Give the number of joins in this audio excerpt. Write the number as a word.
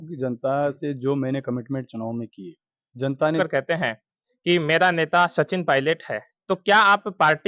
one